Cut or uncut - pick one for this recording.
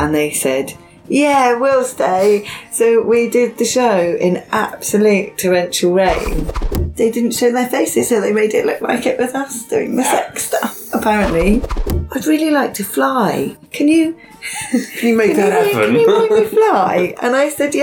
cut